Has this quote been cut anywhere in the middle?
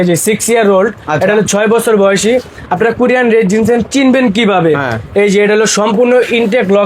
no; 0 cuts

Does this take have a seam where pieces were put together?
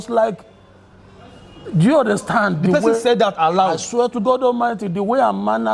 no; 0 cuts

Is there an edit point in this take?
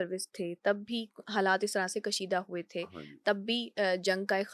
no; 0 cuts

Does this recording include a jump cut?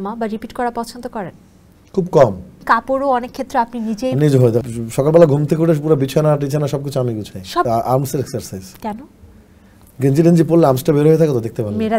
yes; 3 cuts; at 2.5 s, 4.6 s, 7.6 s

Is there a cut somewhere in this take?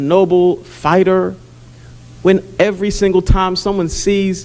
no; 0 cuts

